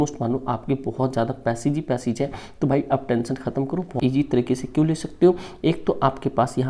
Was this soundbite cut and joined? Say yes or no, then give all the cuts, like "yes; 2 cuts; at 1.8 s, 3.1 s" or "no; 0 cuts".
yes; 1 cut; at 3.9 s